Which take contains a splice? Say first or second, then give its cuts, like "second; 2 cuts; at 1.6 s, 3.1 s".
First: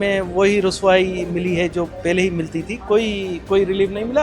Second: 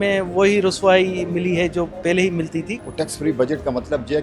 second; 1 cut; at 2.7 s